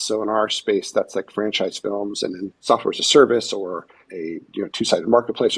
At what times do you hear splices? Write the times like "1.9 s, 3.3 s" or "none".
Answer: 2.6 s, 4.0 s

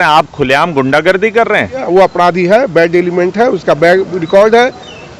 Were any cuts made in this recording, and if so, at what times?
1.8 s

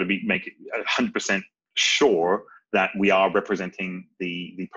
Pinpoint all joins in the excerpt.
none

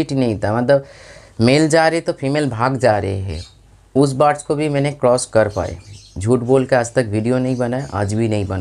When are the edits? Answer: none

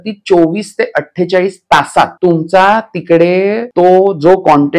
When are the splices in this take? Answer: 2.1 s, 3.6 s

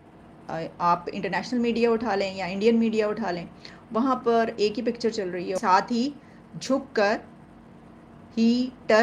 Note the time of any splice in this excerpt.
5.6 s

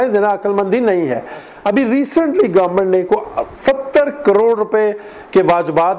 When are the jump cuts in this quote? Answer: none

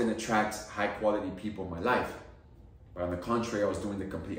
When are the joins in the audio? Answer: none

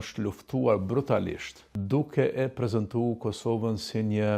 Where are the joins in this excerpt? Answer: 1.7 s

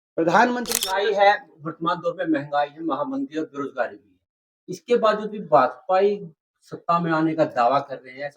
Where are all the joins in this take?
0.9 s

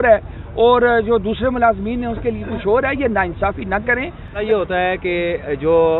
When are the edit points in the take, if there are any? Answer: 4.4 s

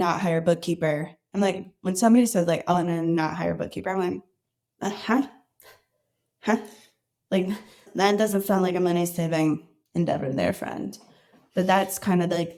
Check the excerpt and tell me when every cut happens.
none

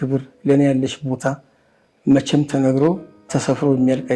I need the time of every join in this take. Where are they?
none

